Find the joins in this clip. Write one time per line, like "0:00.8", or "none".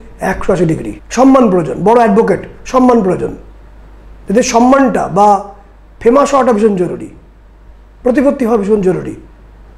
0:01.0